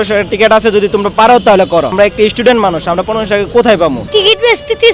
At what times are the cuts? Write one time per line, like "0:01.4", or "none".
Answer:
0:01.9
0:04.0